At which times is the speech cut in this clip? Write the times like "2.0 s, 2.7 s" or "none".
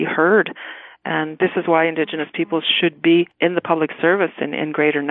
1.3 s, 3.3 s